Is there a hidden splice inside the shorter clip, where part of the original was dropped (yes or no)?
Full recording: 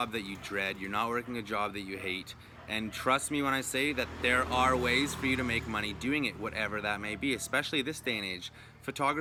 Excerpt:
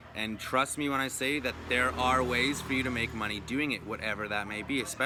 no